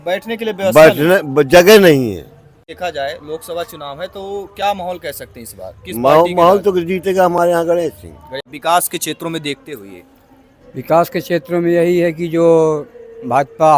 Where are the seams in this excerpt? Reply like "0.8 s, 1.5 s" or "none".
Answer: 2.7 s, 8.5 s